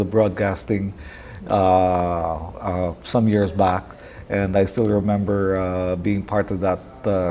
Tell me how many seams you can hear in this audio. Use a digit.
1